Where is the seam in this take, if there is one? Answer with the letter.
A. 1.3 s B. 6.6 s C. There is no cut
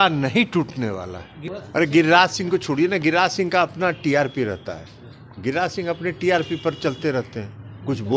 A